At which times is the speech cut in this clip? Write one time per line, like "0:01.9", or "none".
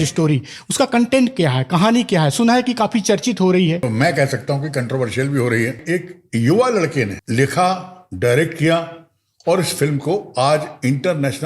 0:03.8
0:05.8
0:07.2